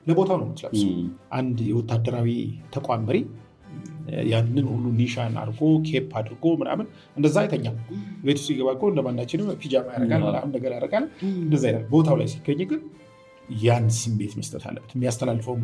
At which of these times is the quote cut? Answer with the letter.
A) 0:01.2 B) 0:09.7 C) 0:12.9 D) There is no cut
A